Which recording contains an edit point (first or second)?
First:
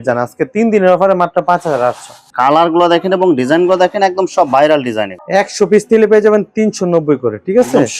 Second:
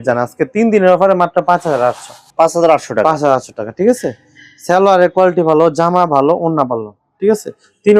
first